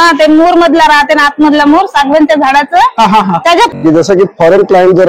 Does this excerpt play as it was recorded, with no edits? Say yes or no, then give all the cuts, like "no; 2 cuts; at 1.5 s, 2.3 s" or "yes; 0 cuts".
no; 1 cut; at 3.8 s